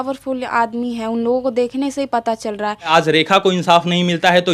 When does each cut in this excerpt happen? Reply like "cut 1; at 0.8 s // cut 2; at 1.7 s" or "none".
cut 1; at 2.9 s